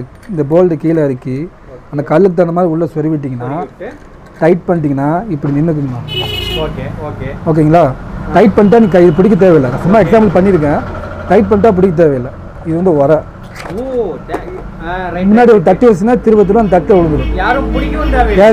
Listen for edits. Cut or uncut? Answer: uncut